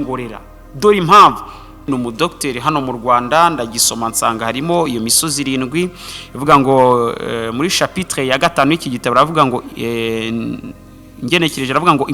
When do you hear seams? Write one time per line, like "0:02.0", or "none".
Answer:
0:01.9